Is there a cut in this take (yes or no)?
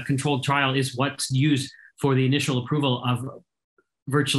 no